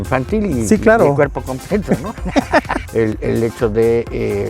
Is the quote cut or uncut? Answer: cut